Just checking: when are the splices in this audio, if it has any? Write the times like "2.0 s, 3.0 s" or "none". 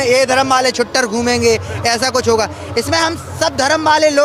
none